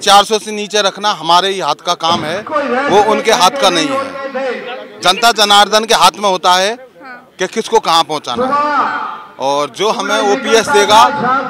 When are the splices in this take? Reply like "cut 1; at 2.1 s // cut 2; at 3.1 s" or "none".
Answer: none